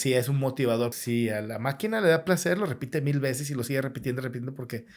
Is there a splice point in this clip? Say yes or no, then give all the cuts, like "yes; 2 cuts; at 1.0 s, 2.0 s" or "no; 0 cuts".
yes; 1 cut; at 1.0 s